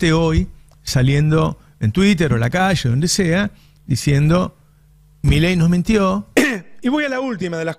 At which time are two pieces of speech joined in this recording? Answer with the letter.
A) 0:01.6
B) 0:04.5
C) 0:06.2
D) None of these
C